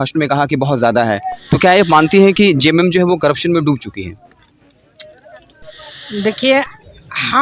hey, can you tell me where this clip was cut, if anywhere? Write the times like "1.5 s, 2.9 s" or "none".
5.6 s

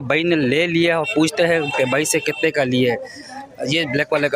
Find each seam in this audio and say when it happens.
none

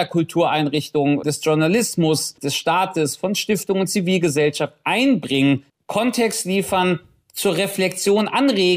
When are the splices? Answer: 1.2 s, 5.8 s

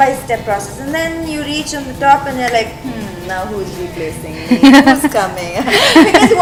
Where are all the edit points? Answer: none

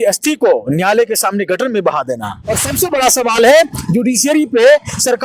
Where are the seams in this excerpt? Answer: 2.4 s

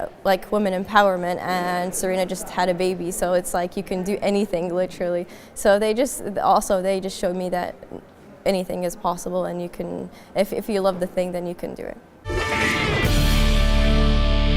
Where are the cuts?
none

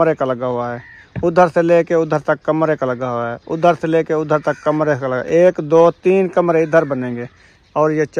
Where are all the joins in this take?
none

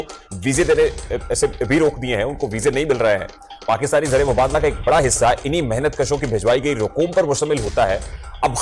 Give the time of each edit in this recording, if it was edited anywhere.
none

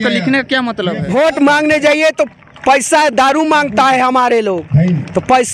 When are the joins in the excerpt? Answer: 1.0 s

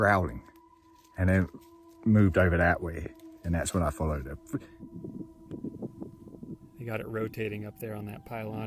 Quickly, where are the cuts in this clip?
4.4 s

